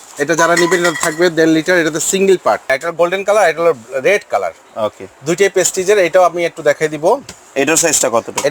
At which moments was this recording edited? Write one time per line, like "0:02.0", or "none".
0:02.8